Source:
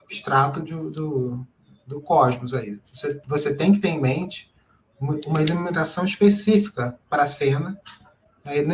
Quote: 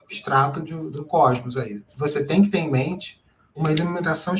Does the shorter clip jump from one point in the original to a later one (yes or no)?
yes